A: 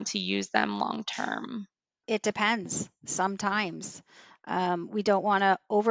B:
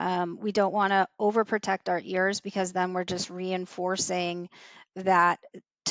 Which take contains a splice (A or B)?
A